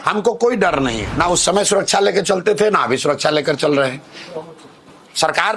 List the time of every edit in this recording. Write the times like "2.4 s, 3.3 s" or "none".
1.0 s